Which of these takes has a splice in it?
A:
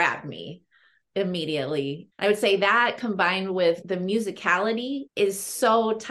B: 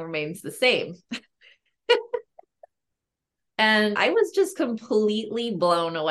A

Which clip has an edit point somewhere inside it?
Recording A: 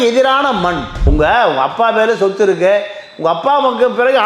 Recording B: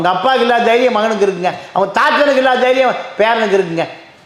A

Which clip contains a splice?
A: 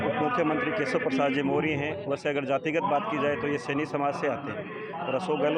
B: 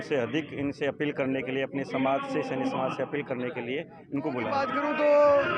B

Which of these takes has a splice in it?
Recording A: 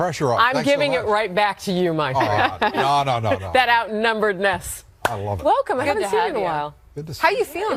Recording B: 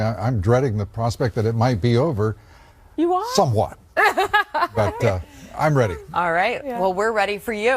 B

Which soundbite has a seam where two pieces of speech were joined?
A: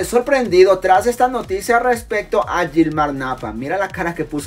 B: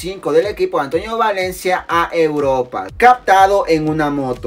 B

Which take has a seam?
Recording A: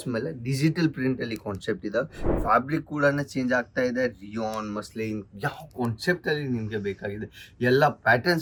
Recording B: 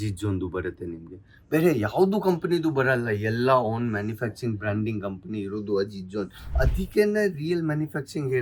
B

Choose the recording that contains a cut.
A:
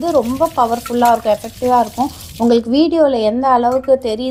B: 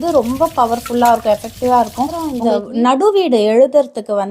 B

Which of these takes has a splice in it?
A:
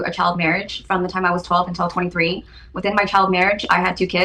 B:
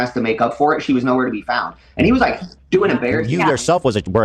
B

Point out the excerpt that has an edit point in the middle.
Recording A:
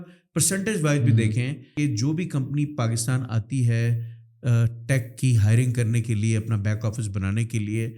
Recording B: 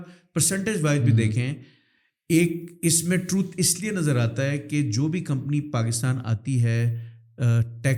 A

